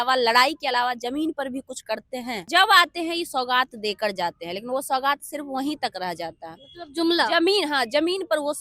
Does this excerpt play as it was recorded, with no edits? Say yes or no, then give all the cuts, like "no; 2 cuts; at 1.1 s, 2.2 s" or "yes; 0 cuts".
no; 1 cut; at 2.5 s